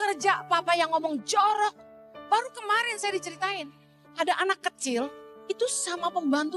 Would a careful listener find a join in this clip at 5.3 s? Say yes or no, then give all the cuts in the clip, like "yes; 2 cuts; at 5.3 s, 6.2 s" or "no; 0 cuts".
yes; 2 cuts; at 4.0 s, 5.3 s